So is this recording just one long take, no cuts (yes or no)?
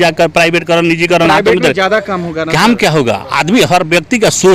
yes